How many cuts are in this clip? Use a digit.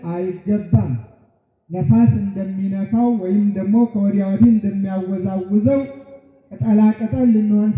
0